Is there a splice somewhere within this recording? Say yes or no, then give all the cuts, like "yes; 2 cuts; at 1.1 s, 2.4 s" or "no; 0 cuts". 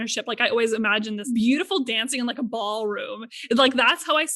yes; 1 cut; at 1.3 s